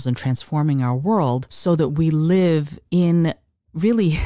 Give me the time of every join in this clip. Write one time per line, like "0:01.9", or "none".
0:01.5